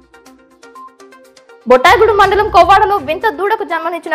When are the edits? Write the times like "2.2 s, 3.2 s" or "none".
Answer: none